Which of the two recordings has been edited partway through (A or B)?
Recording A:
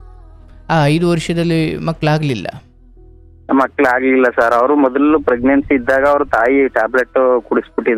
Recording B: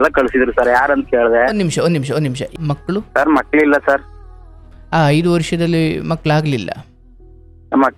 B